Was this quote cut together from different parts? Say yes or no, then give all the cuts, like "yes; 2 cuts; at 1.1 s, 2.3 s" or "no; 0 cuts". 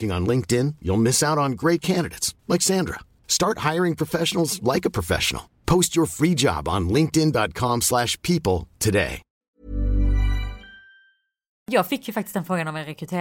yes; 1 cut; at 11.7 s